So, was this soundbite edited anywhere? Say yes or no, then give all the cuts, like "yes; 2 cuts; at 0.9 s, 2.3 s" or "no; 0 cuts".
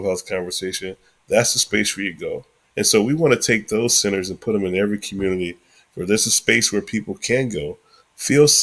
no; 0 cuts